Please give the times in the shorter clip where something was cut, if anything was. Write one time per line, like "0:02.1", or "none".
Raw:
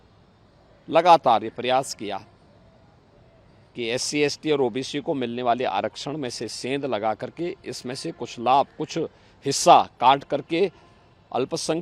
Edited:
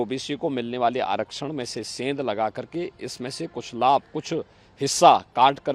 none